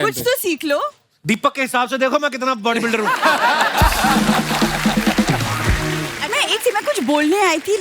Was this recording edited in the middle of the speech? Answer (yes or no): yes